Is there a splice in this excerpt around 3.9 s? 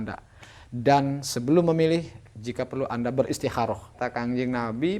yes; 1 cut; at 3.9 s

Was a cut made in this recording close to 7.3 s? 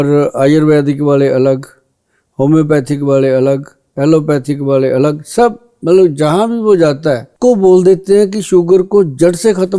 yes; 1 cut; at 7.3 s

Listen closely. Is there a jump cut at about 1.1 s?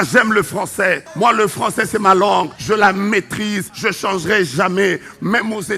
yes; 3 cuts; at 1.1 s, 2.6 s, 3.7 s

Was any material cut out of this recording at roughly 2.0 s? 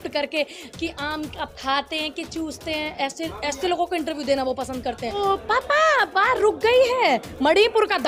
no; 1 cut; at 5.2 s

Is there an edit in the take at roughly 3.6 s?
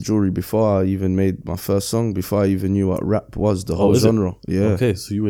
no; 0 cuts

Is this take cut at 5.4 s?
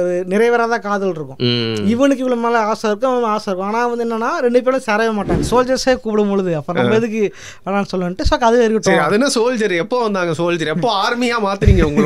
yes; 1 cut; at 5.4 s

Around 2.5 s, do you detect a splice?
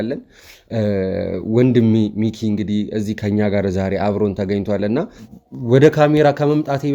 no; 1 cut; at 5.2 s

